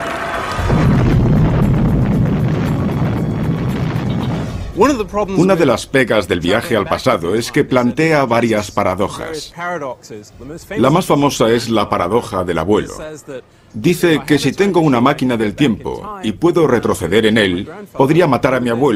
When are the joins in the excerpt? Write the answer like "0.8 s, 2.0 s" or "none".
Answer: 5.8 s